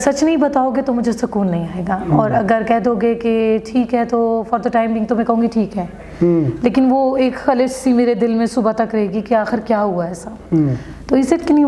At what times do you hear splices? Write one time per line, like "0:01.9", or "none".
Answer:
none